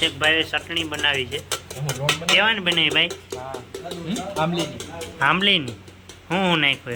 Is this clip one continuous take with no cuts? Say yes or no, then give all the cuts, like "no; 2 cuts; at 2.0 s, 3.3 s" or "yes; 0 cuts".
yes; 0 cuts